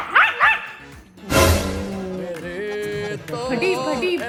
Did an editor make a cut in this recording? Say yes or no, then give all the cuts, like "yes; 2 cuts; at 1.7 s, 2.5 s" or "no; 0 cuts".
no; 0 cuts